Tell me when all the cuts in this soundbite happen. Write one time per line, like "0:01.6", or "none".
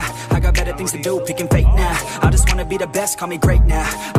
none